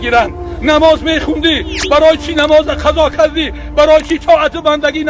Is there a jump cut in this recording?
no; 0 cuts

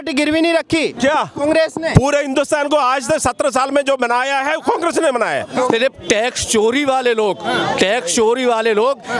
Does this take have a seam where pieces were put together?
yes; 1 cut; at 5.5 s

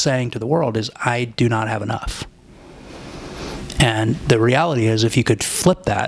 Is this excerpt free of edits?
yes; 0 cuts

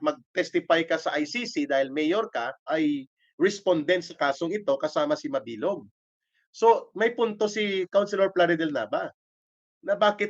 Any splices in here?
yes; 1 cut; at 2.7 s

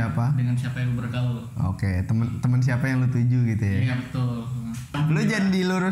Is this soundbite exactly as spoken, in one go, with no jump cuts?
no; 1 cut; at 4.9 s

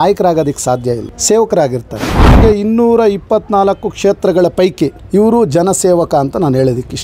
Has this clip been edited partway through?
yes; 3 cuts; at 1.1 s, 2.4 s, 5.0 s

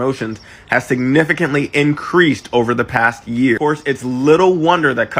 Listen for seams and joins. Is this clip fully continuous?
yes; 0 cuts

